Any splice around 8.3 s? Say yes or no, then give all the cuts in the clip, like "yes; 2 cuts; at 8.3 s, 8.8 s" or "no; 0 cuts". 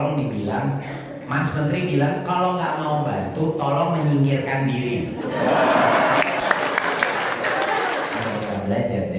yes; 1 cut; at 8.3 s